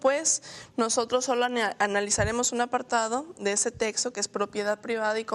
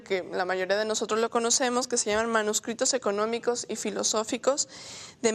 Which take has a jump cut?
first; 1 cut; at 1.5 s

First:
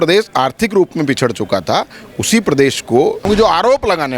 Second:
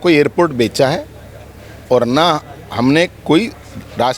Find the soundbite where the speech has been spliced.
first; 1 cut; at 3.2 s

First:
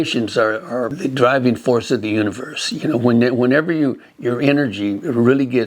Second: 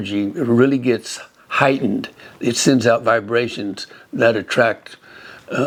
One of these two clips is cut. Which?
first; 1 cut; at 0.9 s

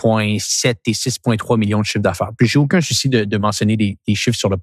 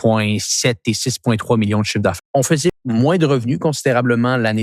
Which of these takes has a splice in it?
second; 1 cut; at 2.5 s

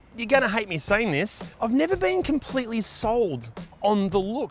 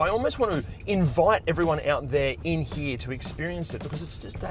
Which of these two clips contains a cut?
first; 1 cut; at 1.4 s

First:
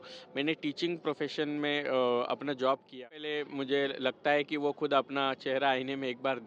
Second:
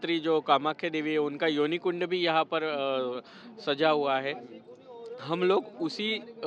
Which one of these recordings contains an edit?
first; 1 cut; at 3.0 s

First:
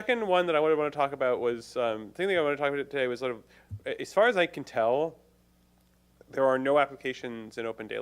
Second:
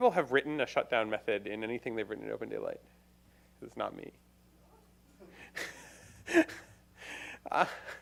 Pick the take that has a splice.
first; 1 cut; at 2.1 s

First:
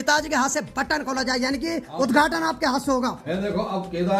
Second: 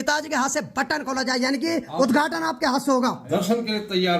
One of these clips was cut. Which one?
second; 1 cut; at 3.2 s

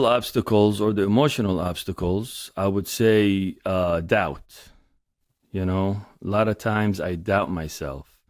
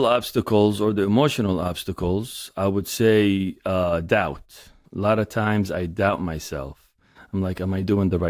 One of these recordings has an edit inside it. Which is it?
second; 1 cut; at 4.8 s

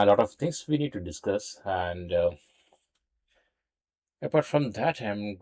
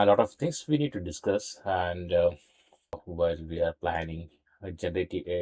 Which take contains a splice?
second; 1 cut; at 3.1 s

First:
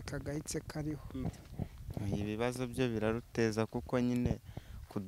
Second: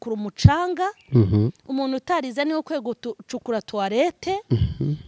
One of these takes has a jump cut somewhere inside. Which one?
first; 1 cut; at 1.2 s

